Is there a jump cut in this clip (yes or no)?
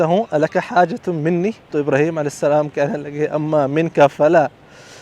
yes